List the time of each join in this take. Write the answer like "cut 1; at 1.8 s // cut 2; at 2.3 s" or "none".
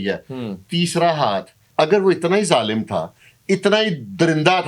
cut 1; at 1.6 s